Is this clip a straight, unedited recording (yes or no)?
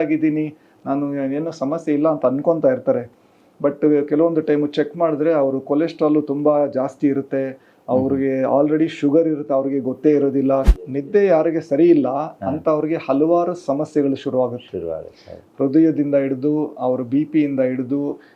no